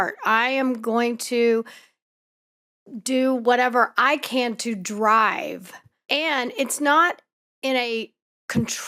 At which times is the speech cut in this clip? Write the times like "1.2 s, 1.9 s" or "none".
5.9 s